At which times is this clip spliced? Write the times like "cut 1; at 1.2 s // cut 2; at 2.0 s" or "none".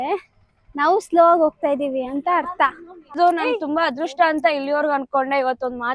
cut 1; at 3.2 s